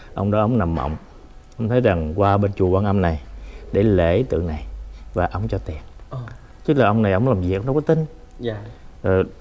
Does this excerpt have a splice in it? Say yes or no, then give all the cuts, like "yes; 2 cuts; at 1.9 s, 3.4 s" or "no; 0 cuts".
no; 0 cuts